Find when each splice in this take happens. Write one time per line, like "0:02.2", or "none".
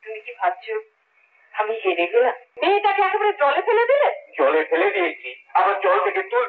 0:02.5